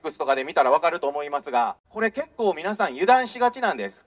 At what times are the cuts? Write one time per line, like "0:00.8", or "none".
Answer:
0:02.0